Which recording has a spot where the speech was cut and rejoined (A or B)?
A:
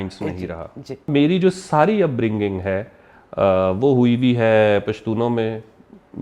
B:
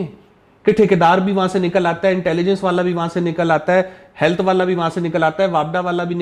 A